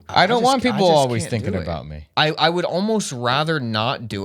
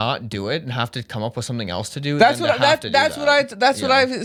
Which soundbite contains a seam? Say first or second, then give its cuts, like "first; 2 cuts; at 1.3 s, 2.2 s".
first; 1 cut; at 2.0 s